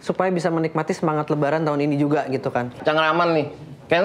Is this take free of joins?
no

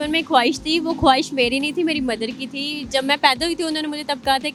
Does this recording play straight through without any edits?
yes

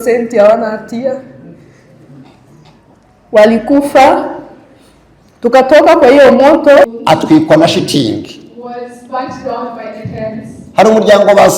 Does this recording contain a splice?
yes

